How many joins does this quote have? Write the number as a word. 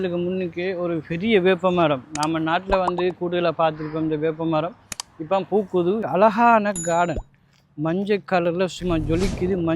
one